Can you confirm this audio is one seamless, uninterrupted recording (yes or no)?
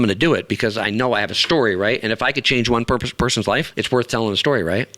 no